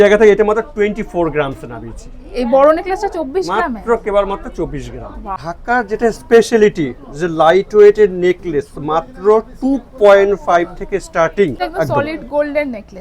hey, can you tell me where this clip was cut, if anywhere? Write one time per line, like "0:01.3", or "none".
0:05.5
0:11.6